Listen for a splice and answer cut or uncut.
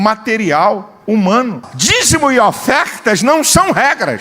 cut